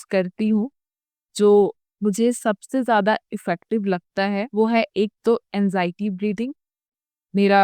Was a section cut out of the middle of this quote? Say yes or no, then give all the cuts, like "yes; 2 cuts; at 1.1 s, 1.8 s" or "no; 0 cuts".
yes; 1 cut; at 4.5 s